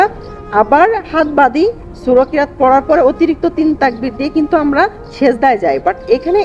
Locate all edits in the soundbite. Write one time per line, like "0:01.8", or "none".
none